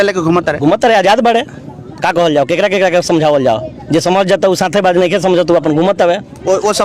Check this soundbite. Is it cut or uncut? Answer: uncut